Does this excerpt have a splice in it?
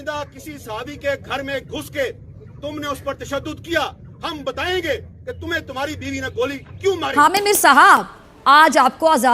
yes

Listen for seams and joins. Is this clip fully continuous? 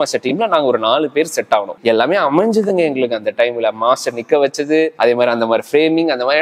no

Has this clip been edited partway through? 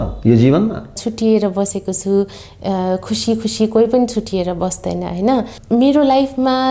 yes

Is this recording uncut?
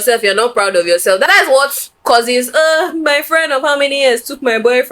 no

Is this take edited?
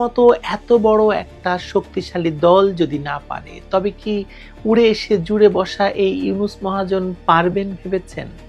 no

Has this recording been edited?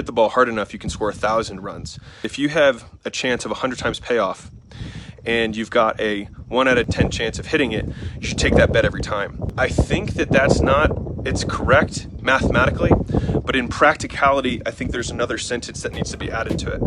yes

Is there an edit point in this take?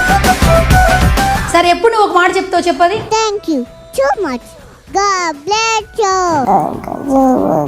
yes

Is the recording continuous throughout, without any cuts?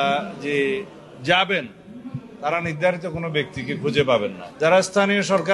no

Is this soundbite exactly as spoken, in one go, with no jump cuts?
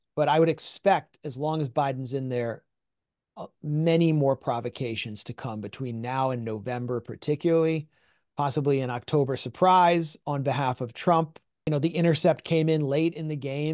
no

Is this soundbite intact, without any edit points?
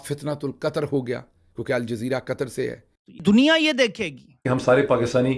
no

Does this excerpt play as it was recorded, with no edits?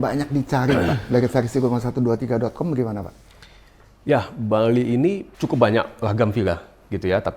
no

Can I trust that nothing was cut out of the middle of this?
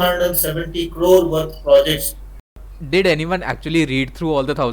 no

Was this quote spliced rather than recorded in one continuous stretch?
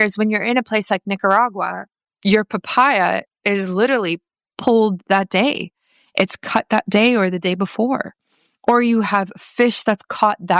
yes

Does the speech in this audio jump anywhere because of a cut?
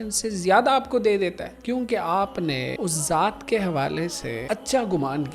yes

